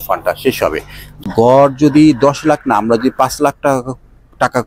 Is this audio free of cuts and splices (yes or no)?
no